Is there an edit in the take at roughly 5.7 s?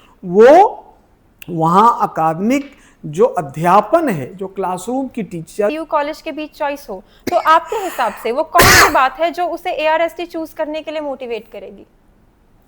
yes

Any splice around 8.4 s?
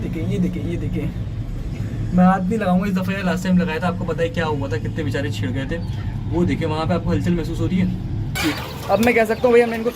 yes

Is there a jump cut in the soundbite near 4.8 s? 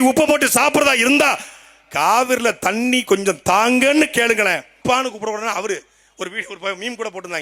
yes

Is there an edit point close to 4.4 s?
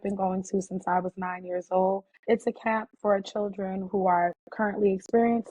no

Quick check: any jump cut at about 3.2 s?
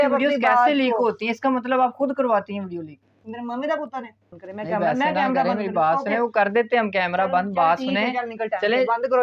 no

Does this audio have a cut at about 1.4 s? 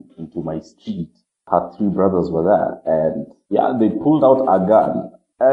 yes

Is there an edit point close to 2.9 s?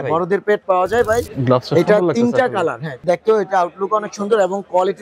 yes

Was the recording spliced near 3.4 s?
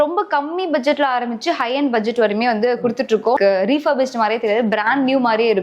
yes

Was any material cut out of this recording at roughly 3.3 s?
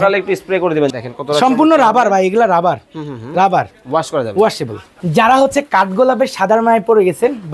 no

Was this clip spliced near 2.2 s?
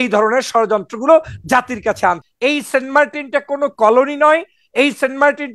yes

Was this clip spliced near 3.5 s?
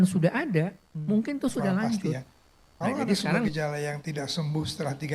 yes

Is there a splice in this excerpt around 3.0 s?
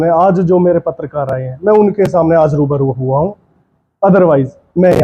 no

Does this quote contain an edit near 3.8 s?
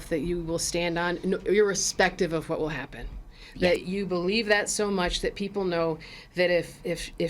yes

